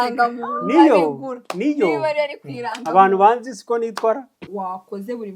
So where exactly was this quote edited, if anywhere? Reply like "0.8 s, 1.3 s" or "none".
4.4 s